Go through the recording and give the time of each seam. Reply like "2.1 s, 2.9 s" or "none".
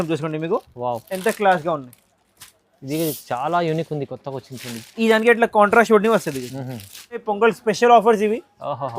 7.3 s